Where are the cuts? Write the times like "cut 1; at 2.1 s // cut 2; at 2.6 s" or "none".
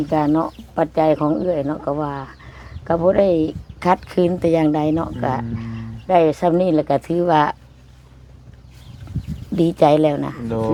none